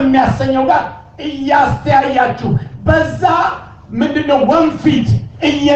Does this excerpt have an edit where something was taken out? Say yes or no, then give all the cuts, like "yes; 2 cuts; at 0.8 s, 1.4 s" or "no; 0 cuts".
no; 0 cuts